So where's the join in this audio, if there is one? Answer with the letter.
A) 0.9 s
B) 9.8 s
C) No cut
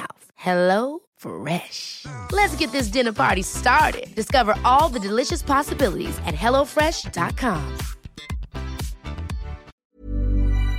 B